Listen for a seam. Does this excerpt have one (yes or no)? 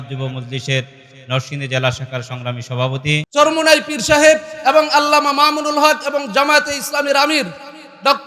yes